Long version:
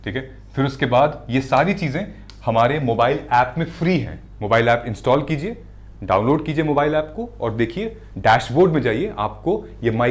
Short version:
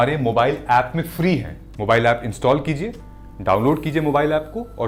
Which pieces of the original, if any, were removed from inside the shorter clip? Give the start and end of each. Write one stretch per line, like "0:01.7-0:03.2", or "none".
none